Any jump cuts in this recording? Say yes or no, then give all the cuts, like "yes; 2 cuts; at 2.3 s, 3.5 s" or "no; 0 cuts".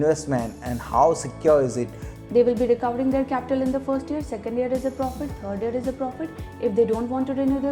yes; 1 cut; at 2.2 s